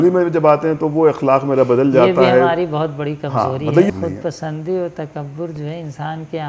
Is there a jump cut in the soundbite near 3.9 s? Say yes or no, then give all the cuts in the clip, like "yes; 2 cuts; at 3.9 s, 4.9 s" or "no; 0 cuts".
yes; 1 cut; at 3.9 s